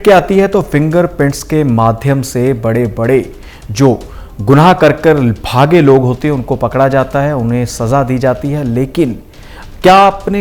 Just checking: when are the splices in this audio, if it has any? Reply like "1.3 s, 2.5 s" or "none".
none